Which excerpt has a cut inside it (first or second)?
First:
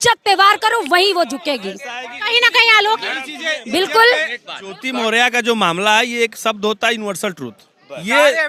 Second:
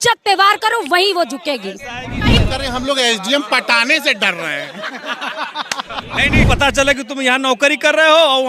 second